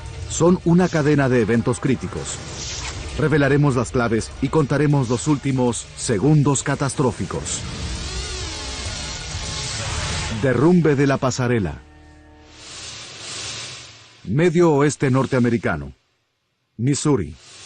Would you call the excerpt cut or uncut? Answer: uncut